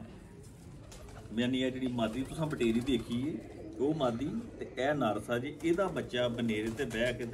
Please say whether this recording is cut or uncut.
uncut